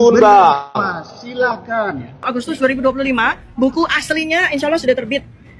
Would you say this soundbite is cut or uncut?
cut